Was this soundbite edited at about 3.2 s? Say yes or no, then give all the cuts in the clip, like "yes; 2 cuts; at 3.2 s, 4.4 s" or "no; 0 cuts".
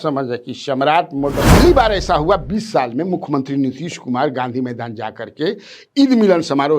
no; 1 cut; at 1.5 s